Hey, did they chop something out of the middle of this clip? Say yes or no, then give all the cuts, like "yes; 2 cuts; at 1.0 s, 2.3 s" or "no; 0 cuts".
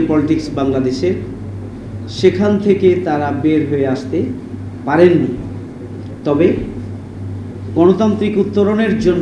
no; 0 cuts